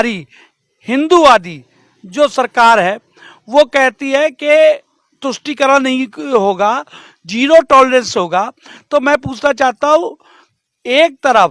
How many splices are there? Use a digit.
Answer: 0